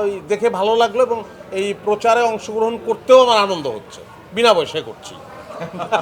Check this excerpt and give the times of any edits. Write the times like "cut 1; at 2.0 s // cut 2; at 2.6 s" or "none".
none